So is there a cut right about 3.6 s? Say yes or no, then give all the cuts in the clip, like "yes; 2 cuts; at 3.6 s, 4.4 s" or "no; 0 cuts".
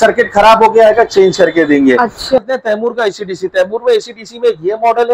no; 1 cut; at 2.4 s